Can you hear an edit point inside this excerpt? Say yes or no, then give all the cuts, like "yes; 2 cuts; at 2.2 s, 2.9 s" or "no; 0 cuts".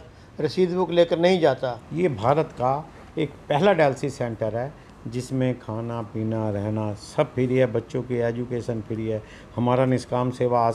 yes; 1 cut; at 1.8 s